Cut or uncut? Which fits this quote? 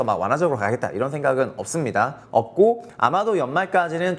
cut